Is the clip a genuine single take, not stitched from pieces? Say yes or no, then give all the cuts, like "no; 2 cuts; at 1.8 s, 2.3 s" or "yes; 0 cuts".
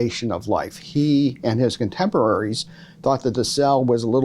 no; 1 cut; at 1.2 s